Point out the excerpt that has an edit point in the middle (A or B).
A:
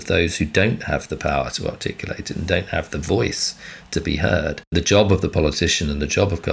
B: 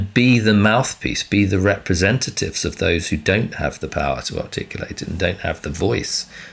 A